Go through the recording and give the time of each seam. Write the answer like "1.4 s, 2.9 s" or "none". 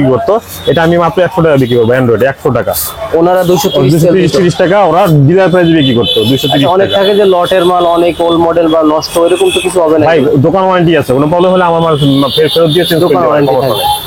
none